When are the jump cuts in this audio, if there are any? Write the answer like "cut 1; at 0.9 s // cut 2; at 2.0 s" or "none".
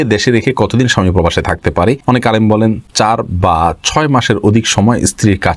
cut 1; at 2.0 s // cut 2; at 2.9 s